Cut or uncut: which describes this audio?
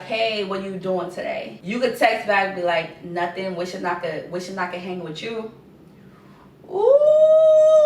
cut